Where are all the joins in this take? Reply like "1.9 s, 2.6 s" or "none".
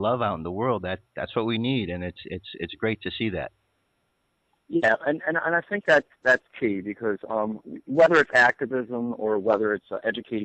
none